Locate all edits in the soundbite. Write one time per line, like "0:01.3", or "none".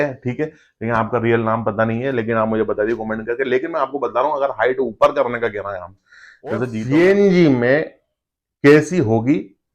0:06.8